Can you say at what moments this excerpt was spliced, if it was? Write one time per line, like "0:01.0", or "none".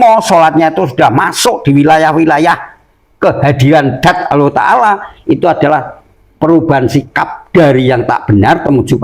none